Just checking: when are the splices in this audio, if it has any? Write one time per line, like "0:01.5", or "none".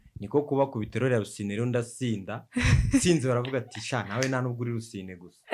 none